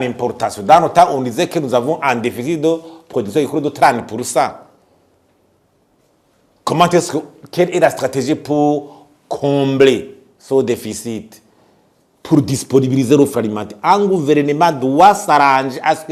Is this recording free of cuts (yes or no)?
yes